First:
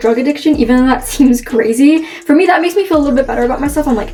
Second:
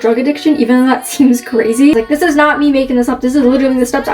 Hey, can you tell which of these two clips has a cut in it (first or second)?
second